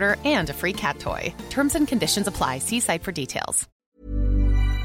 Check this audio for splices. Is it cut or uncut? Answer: cut